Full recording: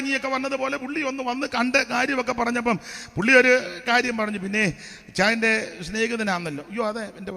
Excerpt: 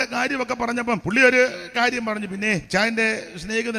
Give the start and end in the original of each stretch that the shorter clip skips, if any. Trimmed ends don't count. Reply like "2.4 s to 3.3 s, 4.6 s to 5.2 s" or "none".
2.8 s to 3.2 s, 4.8 s to 5.1 s

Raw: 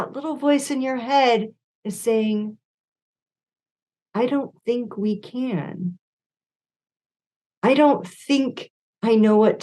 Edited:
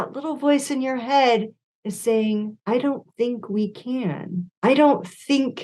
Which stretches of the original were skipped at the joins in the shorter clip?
2.6 s to 4.0 s, 6.0 s to 7.5 s

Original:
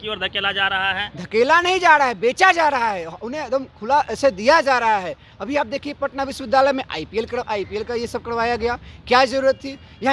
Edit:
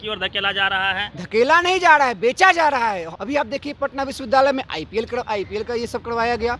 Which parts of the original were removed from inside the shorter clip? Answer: 3.1 s to 5.3 s

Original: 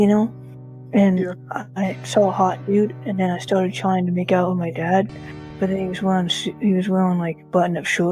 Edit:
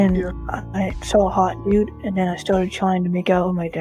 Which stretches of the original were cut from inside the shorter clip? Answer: none

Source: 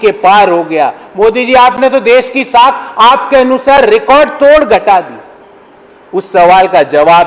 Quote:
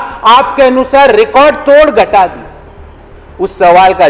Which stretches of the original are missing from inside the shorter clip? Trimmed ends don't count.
none

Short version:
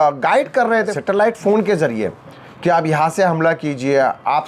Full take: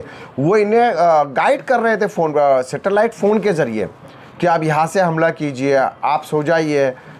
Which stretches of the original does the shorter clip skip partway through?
2.1 s to 2.7 s

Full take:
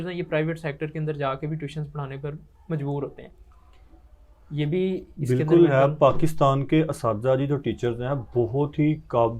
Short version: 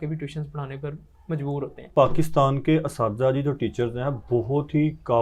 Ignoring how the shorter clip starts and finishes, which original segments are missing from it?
3.3 s to 5.9 s

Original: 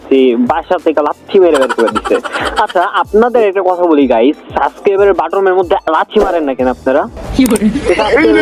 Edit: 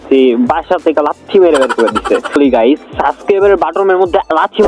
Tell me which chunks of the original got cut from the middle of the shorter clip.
2.4 s to 3.9 s

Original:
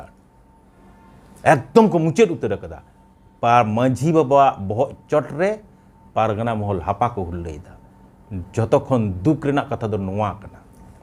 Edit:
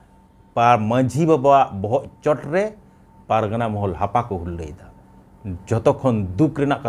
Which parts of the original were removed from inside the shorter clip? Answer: none

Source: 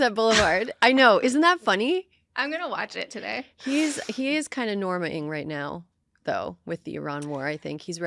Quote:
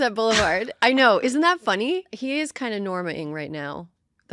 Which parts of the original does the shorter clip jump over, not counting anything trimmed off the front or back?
2.1 s to 4.1 s

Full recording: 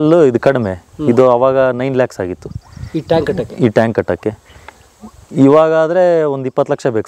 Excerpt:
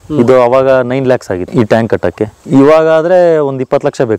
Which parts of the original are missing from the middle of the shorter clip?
2.4 s to 3.5 s, 4.4 s to 5.2 s

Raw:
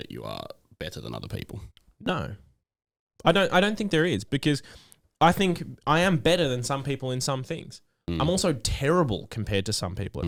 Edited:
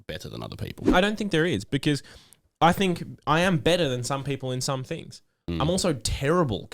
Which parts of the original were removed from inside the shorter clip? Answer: 1.6 s to 3.5 s

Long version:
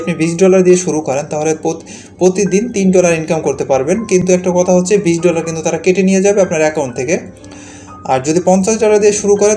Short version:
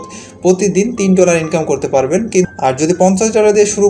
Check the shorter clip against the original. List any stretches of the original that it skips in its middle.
4.2 s to 7.9 s

